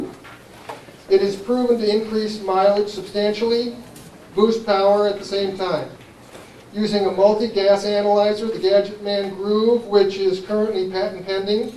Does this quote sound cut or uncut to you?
uncut